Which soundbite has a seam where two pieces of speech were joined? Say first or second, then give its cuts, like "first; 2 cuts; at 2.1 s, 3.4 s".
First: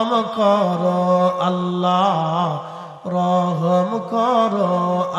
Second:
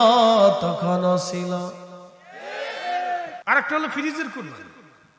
second; 1 cut; at 3.4 s